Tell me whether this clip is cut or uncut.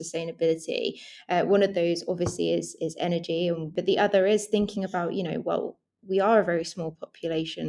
cut